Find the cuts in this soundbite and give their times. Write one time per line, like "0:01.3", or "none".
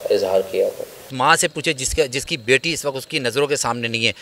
0:01.1